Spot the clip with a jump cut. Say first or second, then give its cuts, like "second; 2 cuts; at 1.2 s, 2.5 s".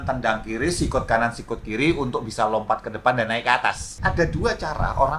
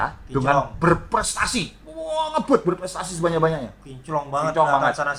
first; 1 cut; at 3.9 s